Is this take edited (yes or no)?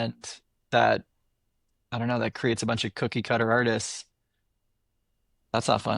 no